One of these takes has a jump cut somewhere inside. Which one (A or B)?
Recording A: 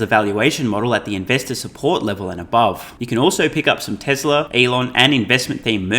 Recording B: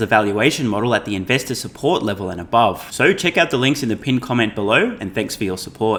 A